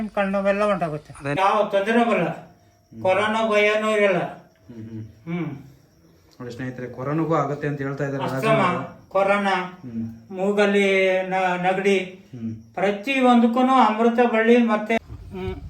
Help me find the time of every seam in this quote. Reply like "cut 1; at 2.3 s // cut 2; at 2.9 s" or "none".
cut 1; at 1.4 s // cut 2; at 15.0 s